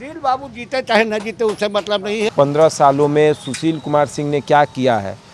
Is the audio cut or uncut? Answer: cut